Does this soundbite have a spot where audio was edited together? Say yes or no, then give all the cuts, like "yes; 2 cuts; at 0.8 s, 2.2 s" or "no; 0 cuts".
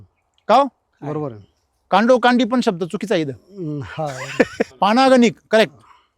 yes; 1 cut; at 4.7 s